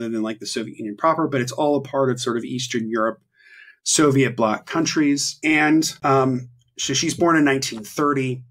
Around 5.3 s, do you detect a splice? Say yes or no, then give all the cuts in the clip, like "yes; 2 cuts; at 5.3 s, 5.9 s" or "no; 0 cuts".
yes; 2 cuts; at 5.3 s, 5.9 s